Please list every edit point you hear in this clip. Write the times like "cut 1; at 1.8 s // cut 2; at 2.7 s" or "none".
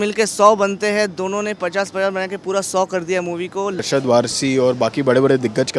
cut 1; at 3.8 s